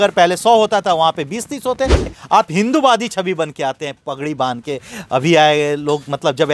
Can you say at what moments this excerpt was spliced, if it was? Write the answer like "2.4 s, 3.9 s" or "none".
2.1 s